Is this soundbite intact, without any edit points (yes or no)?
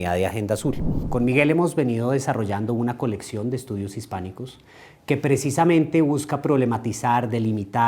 no